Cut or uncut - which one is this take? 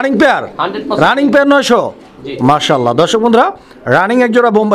uncut